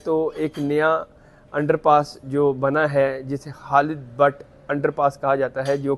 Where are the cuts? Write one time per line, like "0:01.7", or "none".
none